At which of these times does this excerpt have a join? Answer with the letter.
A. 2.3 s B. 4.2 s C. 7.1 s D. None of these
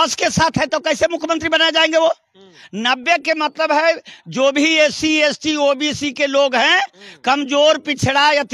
D